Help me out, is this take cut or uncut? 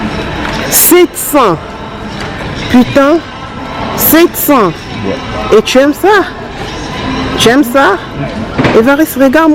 uncut